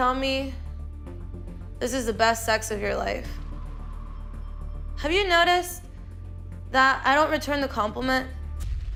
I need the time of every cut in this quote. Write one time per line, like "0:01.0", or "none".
none